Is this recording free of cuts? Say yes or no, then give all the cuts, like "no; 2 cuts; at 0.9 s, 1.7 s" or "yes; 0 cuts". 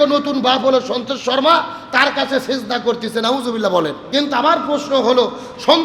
no; 1 cut; at 4.0 s